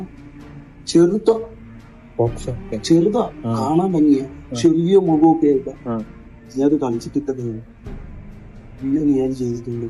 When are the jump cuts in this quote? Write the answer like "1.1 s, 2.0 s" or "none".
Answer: none